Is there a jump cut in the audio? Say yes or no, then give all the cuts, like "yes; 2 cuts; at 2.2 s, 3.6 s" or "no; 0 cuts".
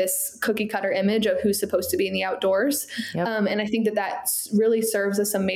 no; 0 cuts